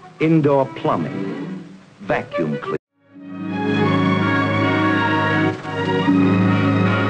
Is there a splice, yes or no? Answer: no